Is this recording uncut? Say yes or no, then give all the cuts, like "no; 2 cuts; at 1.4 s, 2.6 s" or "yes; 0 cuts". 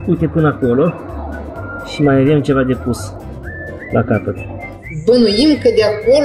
yes; 0 cuts